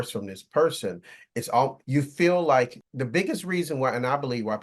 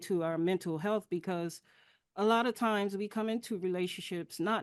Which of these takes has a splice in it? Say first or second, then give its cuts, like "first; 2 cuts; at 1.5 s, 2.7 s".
first; 2 cuts; at 1.8 s, 2.9 s